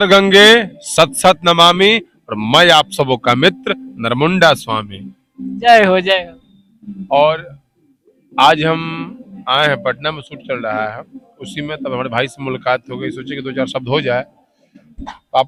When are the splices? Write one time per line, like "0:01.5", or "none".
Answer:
none